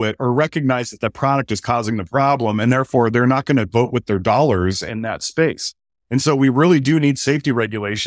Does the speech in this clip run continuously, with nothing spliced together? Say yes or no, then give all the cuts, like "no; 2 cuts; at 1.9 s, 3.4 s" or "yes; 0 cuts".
yes; 0 cuts